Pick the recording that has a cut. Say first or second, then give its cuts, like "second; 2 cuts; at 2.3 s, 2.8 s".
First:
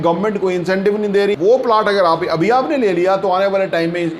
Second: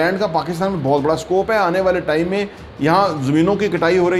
first; 1 cut; at 1.4 s